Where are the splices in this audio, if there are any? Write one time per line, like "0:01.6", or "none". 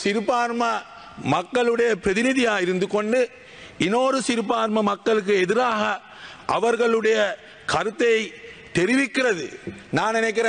none